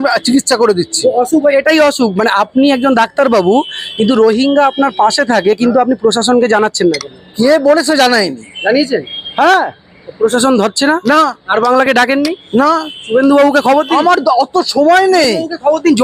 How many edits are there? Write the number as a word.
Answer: zero